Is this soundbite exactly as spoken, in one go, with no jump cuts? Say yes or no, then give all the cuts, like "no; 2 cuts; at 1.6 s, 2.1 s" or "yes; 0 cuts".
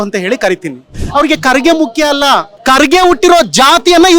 no; 2 cuts; at 1.0 s, 2.5 s